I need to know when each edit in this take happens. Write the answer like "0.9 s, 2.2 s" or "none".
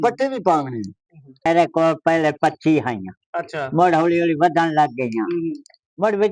1.4 s